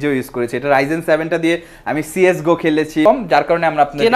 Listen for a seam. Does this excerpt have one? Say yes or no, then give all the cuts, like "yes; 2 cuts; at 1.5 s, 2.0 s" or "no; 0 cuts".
yes; 1 cut; at 3.0 s